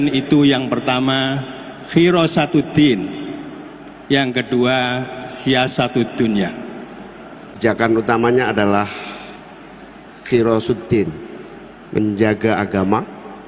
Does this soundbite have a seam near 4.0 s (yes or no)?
no